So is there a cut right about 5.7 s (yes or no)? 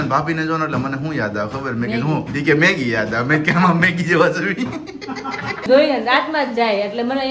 yes